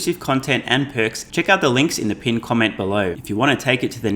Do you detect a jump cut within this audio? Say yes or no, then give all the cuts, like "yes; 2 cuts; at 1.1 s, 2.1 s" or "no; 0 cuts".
yes; 2 cuts; at 1.2 s, 3.2 s